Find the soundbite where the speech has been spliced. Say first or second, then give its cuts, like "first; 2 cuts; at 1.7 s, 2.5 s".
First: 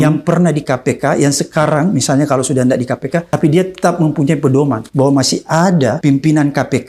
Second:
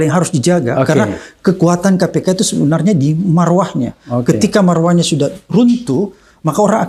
first; 3 cuts; at 3.3 s, 4.8 s, 6.0 s